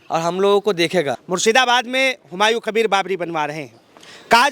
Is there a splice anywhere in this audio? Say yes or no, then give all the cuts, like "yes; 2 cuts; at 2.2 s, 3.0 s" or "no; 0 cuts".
yes; 1 cut; at 1.2 s